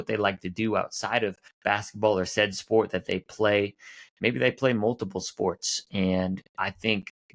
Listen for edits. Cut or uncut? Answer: cut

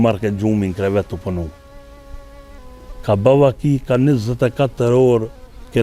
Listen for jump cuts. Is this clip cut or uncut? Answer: uncut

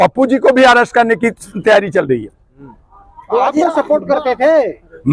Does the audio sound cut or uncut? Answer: uncut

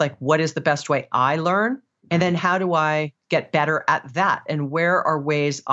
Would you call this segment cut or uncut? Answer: cut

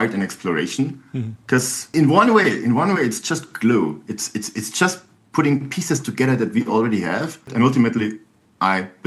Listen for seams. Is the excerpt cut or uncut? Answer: cut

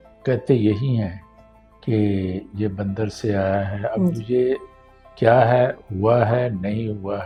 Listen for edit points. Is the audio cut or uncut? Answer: uncut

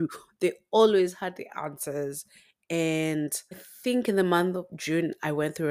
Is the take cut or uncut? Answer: cut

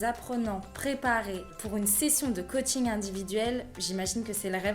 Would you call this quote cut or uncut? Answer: cut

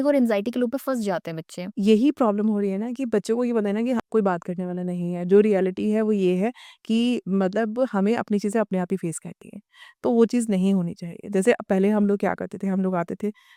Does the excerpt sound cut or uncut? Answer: uncut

